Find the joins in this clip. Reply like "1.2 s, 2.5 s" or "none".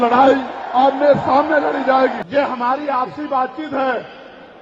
2.2 s